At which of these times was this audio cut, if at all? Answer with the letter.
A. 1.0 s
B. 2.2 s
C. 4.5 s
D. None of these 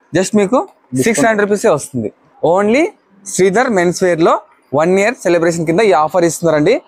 B